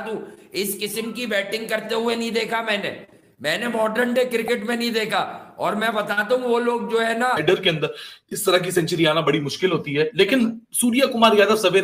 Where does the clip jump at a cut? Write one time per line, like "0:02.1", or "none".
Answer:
0:07.4